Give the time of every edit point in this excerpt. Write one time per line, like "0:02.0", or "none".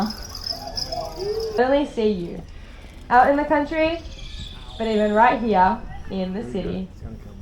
0:01.6